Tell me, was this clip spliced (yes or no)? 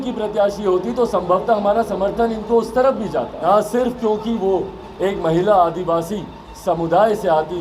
yes